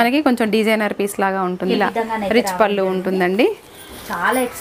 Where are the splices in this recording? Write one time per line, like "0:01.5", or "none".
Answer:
0:01.7